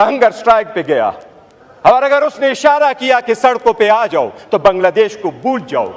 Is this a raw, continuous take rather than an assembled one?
yes; 0 cuts

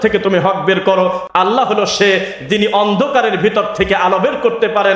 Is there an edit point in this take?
yes; 1 cut; at 1.2 s

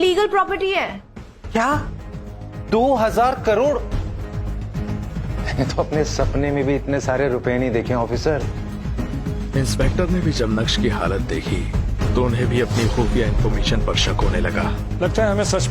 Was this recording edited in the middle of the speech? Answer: yes; 2 cuts; at 5.3 s, 8.7 s

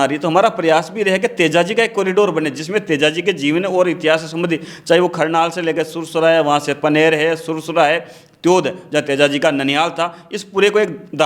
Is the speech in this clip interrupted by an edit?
no; 0 cuts

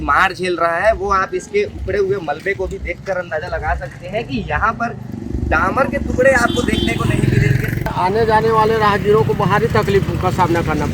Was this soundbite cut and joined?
yes; 1 cut; at 7.8 s

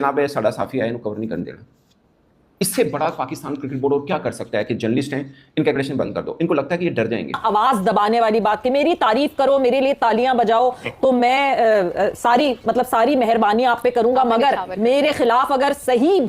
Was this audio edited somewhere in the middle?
yes; 1 cut; at 7.4 s

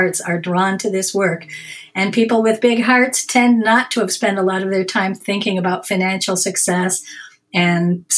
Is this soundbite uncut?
yes; 0 cuts

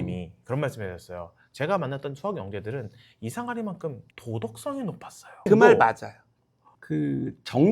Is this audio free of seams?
no; 1 cut; at 6.8 s

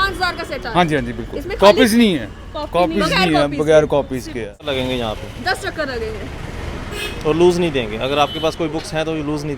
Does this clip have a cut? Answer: yes; 1 cut; at 4.7 s

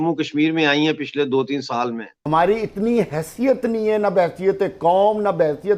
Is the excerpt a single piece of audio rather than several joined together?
no; 1 cut; at 2.1 s

